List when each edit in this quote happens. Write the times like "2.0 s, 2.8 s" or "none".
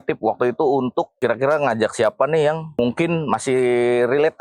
1.1 s, 2.8 s